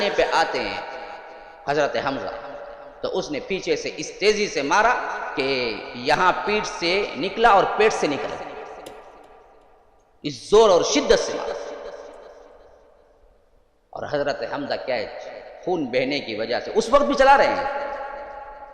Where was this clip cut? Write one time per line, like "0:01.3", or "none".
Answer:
none